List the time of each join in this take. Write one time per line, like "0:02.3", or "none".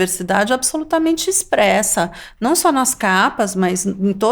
none